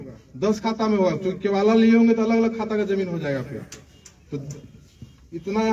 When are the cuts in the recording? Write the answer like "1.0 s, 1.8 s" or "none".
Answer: none